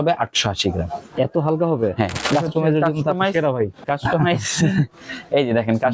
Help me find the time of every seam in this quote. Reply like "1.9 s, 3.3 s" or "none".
2.2 s, 3.8 s